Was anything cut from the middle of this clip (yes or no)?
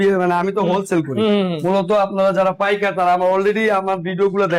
no